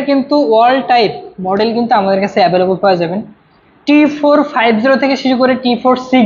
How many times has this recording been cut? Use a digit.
0